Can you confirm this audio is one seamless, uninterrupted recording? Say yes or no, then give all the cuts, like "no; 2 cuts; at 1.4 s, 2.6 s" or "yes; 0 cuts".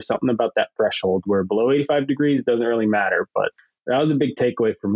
no; 1 cut; at 3.5 s